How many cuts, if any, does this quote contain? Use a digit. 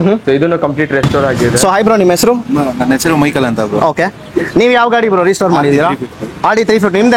1